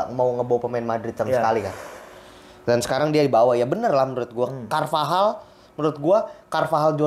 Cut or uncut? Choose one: uncut